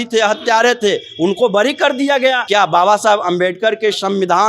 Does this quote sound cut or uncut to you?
cut